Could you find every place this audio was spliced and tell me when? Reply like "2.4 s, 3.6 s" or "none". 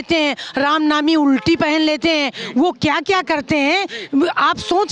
none